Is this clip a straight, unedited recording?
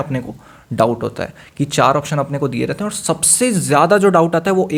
yes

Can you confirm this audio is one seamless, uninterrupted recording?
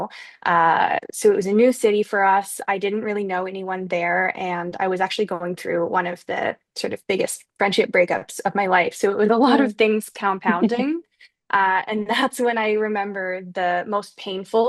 yes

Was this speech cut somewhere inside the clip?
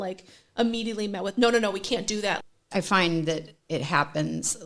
yes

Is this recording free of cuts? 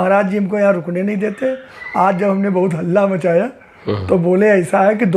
yes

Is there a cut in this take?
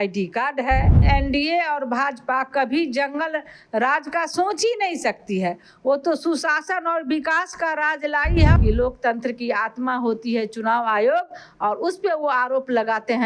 yes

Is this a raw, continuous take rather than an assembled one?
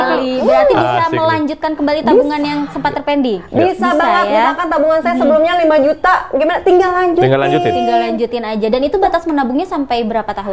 yes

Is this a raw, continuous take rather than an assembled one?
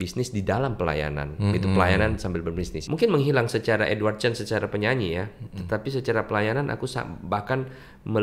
no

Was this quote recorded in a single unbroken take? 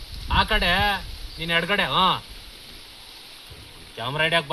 yes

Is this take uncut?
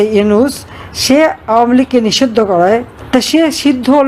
no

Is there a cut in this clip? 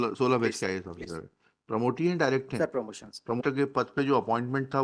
yes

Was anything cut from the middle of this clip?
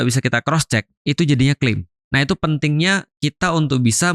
yes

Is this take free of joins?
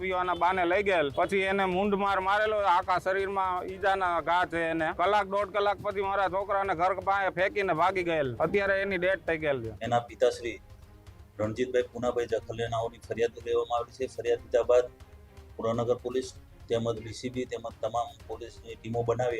no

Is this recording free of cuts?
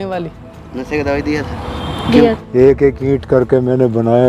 no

